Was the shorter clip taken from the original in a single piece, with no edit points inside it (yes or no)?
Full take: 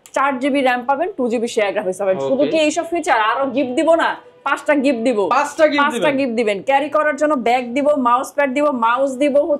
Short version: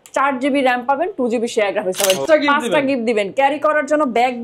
no